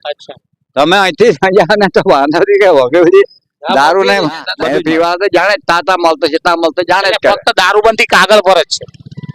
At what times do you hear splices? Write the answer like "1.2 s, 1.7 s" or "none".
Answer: 4.5 s